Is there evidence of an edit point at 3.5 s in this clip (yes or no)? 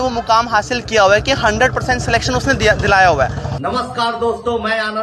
yes